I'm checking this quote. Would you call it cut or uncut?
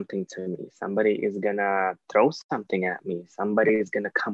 uncut